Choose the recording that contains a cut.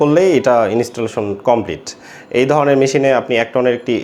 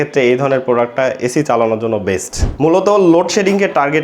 second; 1 cut; at 2.5 s

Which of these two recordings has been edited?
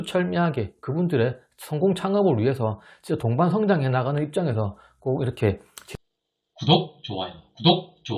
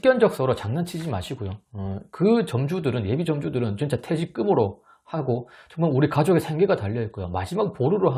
first; 1 cut; at 5.7 s

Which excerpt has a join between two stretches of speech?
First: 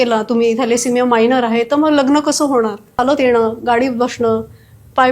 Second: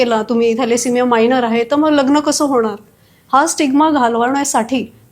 first; 1 cut; at 3.0 s

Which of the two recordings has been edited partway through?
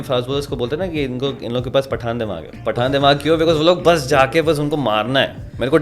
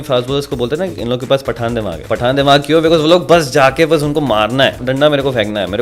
second; 3 cuts; at 0.9 s, 2.0 s, 4.8 s

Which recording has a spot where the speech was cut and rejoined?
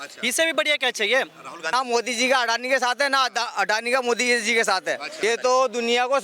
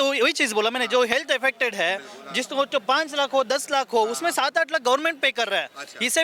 first; 2 cuts; at 1.7 s, 5.2 s

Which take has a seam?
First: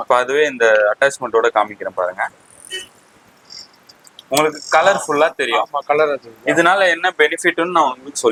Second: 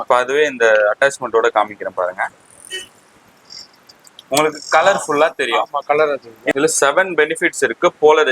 second; 1 cut; at 6.5 s

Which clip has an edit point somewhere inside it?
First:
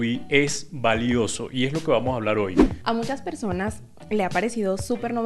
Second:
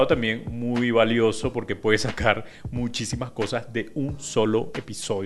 first; 1 cut; at 2.6 s

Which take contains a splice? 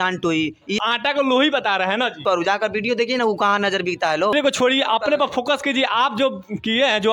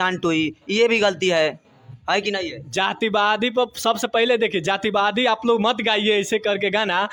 first; 3 cuts; at 0.8 s, 2.2 s, 4.3 s

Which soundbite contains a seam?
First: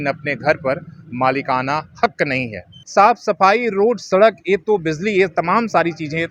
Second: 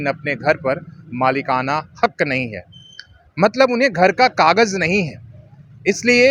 first; 1 cut; at 2.8 s

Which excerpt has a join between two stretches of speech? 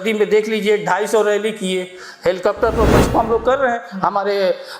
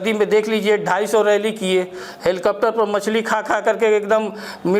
first; 1 cut; at 3.1 s

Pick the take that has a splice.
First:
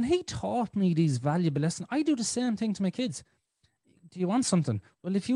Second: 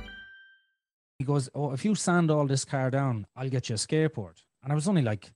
second; 1 cut; at 1.2 s

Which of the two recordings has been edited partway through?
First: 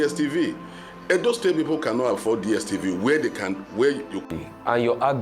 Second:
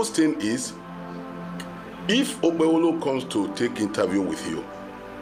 first; 1 cut; at 4.3 s

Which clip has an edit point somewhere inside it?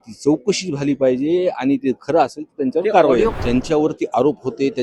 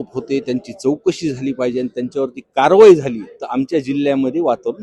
first; 1 cut; at 3.3 s

